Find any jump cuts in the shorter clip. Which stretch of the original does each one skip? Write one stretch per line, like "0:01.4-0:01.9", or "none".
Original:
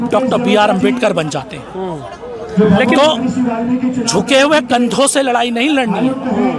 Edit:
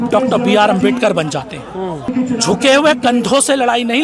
0:02.1-0:03.8